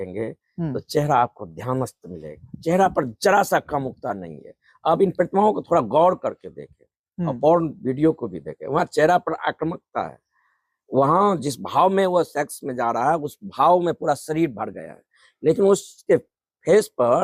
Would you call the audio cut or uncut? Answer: uncut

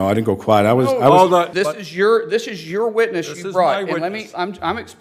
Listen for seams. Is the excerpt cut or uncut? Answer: cut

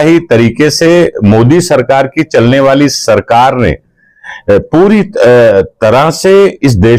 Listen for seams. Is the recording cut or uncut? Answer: uncut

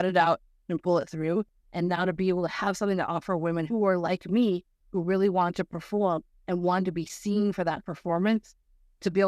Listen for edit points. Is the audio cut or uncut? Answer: cut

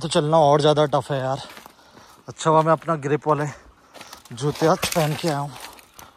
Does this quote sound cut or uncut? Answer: uncut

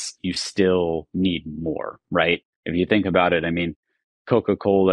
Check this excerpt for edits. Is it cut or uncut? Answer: uncut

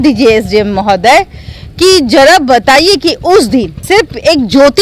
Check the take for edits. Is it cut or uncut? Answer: cut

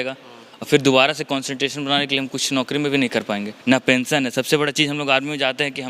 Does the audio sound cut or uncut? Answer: cut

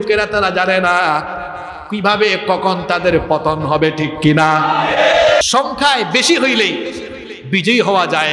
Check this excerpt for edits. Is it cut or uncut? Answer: cut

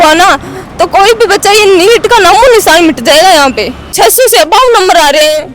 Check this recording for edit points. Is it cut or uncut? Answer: cut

